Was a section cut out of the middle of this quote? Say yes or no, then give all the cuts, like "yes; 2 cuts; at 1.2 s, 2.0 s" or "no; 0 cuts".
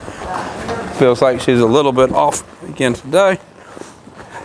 no; 0 cuts